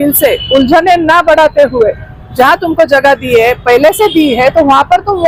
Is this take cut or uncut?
uncut